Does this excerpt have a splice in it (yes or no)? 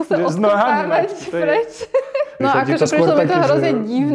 yes